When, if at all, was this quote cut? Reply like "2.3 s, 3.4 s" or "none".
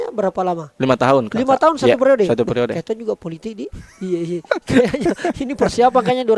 none